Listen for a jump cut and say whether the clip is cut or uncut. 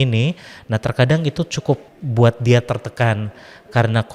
cut